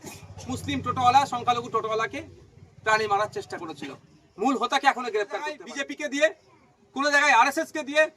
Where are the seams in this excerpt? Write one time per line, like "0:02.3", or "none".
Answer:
0:05.7